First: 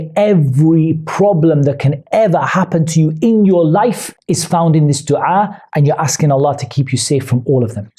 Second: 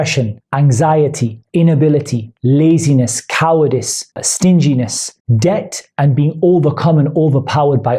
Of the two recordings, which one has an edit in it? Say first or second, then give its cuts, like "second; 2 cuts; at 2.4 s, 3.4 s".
second; 1 cut; at 4.1 s